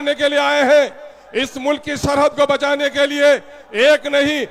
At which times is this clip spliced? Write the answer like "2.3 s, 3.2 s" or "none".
none